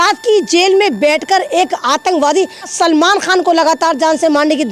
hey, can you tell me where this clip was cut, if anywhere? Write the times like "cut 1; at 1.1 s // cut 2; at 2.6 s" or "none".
cut 1; at 2.7 s

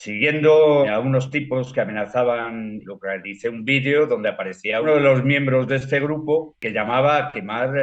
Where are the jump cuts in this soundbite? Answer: cut 1; at 0.9 s // cut 2; at 2.8 s // cut 3; at 6.6 s

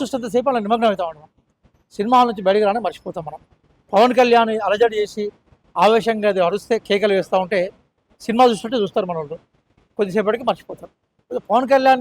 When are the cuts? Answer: none

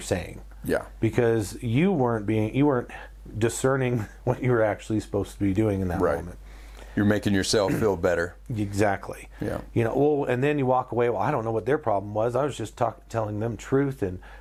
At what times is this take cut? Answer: none

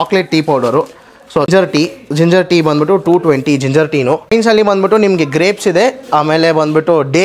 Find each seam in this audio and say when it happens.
cut 1; at 1.5 s // cut 2; at 4.3 s

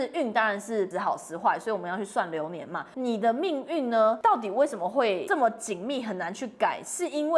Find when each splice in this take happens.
cut 1; at 0.9 s // cut 2; at 2.9 s // cut 3; at 4.2 s // cut 4; at 5.2 s

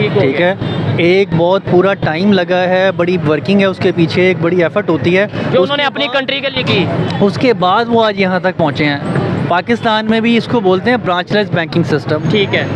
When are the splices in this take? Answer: none

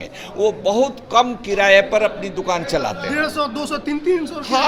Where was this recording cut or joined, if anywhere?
none

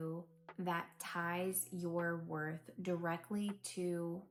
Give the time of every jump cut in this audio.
none

